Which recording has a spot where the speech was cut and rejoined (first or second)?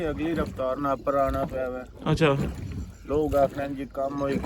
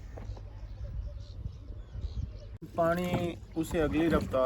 second